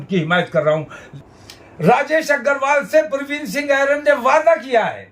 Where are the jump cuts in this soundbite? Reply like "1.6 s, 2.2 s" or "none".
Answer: 1.0 s